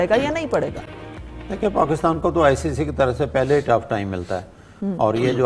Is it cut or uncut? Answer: uncut